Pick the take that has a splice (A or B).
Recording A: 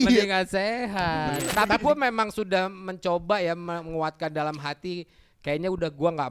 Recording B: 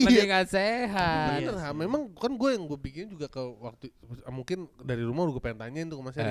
A